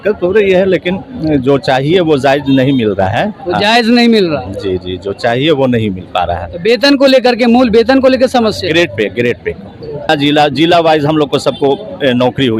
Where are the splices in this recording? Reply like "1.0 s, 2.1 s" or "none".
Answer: 10.1 s

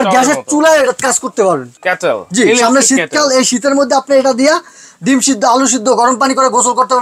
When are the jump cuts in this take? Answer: 1.7 s

